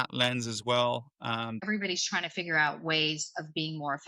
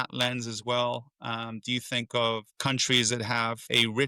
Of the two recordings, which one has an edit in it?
first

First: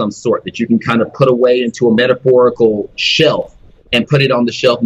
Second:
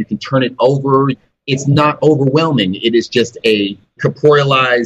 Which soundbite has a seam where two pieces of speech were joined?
second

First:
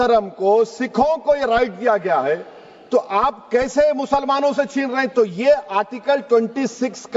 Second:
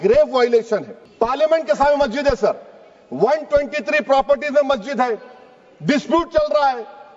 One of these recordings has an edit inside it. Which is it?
second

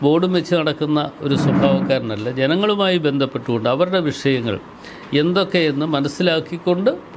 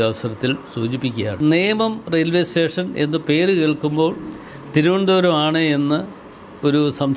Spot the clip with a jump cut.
second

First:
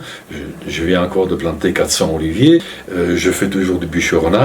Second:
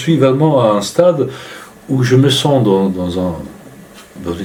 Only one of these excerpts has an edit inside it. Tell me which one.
first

